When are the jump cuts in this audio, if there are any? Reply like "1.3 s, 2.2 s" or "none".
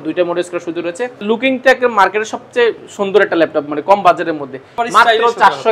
1.2 s, 4.8 s